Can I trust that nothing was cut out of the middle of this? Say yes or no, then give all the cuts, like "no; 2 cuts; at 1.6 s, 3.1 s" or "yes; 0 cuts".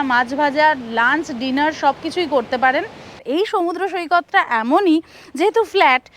no; 1 cut; at 3.2 s